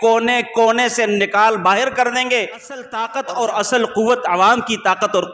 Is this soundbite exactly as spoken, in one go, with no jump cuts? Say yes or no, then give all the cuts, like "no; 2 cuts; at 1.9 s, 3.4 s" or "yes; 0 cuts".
no; 1 cut; at 3.0 s